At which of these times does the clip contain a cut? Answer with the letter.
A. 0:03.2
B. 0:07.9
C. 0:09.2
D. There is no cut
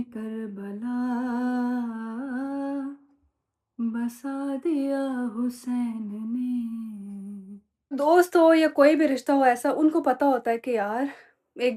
B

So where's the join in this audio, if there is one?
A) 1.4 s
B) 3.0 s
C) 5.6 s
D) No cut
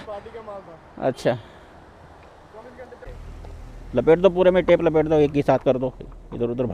B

